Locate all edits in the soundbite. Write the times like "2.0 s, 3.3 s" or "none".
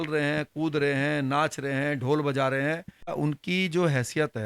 3.1 s